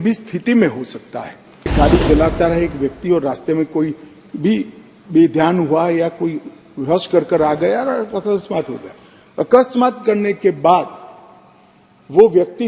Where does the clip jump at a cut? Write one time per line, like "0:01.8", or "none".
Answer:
0:01.7